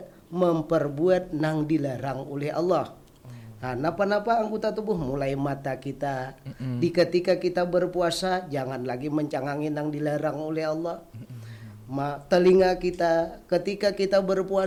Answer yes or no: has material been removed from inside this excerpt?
no